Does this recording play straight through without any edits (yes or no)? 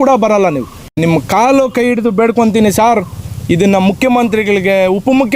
no